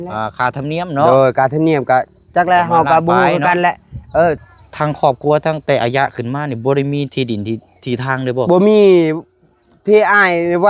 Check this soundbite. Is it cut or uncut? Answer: cut